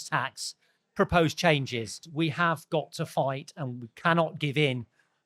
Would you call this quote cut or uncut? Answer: cut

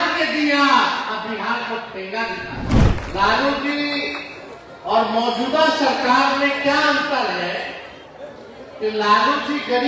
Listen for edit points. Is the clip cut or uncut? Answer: cut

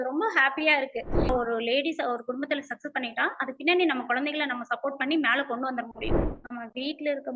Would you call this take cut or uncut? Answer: cut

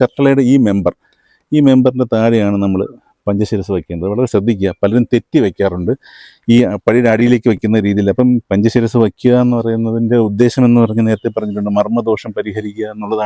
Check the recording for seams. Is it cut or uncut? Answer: uncut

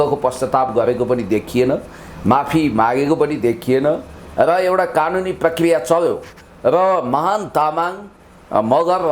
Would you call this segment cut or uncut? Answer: uncut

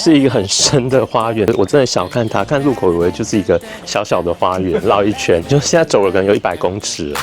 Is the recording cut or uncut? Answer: cut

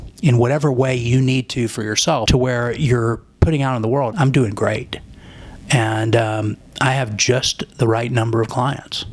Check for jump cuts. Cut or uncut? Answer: cut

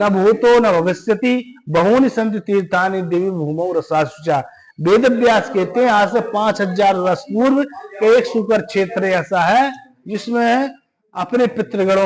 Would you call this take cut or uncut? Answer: uncut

